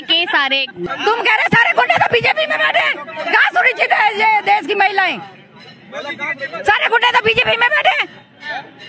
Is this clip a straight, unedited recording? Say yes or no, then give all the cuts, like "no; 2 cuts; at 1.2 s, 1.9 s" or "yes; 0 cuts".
no; 1 cut; at 0.9 s